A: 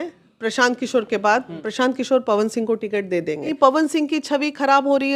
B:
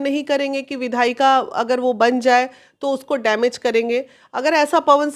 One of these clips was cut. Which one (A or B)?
A